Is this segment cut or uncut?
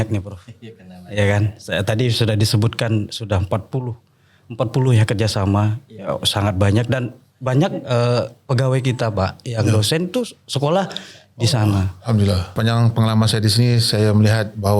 cut